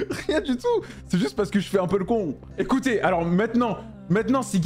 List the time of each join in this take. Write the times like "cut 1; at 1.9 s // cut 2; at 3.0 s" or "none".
none

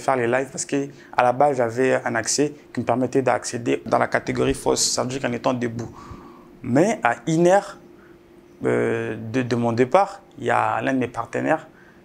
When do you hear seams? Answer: cut 1; at 3.9 s

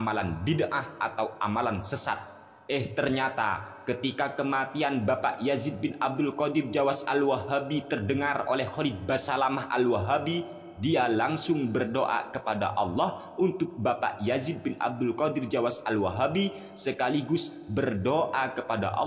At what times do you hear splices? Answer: none

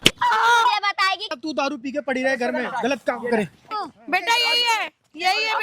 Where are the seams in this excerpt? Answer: cut 1; at 1.4 s // cut 2; at 3.7 s

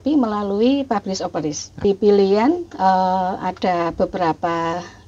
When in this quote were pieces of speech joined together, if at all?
cut 1; at 1.8 s

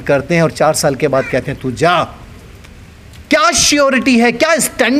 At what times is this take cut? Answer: none

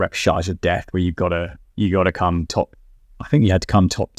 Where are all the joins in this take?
none

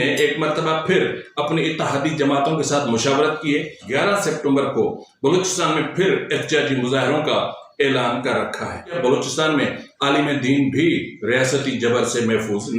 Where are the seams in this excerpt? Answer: cut 1; at 3.8 s // cut 2; at 8.9 s

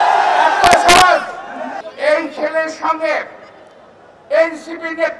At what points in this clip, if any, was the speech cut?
cut 1; at 1.8 s

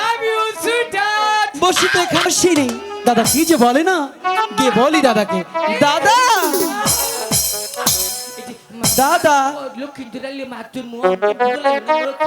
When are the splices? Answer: cut 1; at 2.3 s

